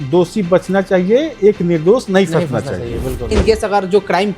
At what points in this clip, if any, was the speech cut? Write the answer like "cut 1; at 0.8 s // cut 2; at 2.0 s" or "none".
cut 1; at 3.3 s